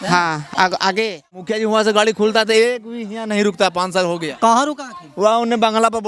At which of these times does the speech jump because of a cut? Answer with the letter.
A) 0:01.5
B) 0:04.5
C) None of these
A